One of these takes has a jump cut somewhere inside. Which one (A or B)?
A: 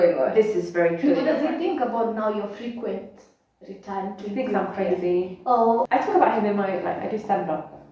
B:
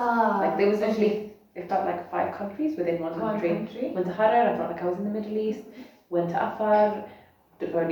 A